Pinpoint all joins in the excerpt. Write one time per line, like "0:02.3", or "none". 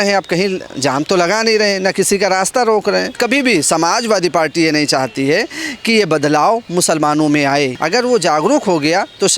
0:03.2
0:07.7